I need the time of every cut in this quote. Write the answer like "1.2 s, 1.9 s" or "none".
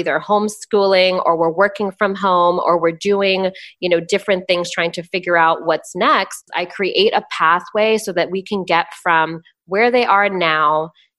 6.6 s